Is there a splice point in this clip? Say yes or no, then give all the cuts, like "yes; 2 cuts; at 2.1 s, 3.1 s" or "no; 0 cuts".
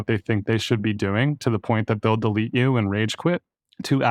no; 0 cuts